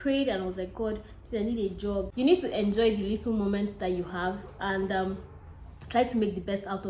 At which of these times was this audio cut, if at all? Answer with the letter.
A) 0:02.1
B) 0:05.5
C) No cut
A